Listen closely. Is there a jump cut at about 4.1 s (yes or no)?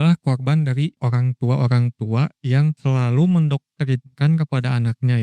no